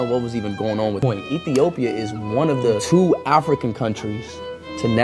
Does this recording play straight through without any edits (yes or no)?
no